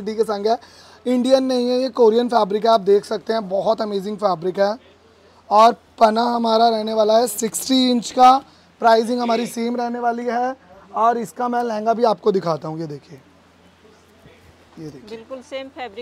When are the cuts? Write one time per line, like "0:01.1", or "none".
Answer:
none